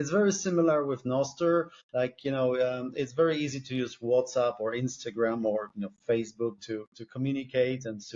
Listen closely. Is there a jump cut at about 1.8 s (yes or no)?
yes